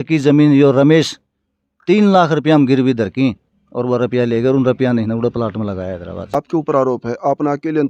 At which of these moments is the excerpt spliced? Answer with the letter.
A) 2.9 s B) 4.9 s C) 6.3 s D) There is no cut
C